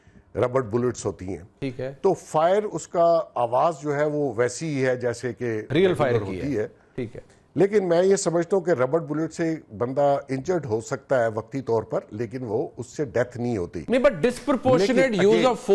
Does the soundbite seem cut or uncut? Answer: uncut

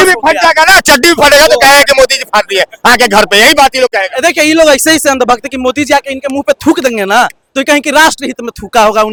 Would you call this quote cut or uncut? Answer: uncut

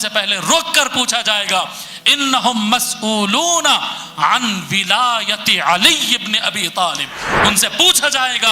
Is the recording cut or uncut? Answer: uncut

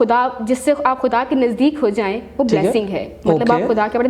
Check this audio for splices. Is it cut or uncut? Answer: uncut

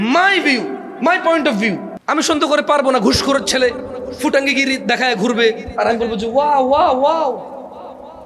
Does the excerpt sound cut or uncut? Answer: cut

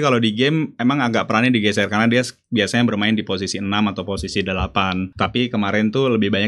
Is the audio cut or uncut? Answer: cut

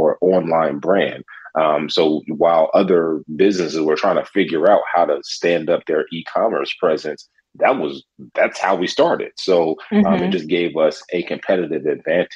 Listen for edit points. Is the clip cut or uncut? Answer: uncut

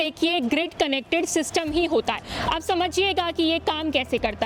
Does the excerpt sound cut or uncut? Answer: uncut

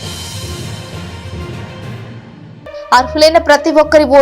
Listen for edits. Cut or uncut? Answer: cut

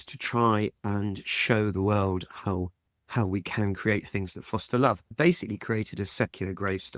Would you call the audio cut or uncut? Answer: cut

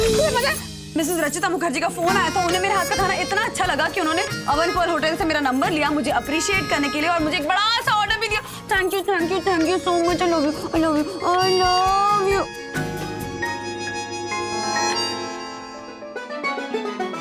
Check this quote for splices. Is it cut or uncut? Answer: uncut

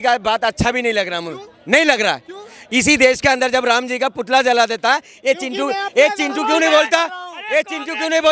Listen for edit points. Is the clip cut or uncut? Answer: uncut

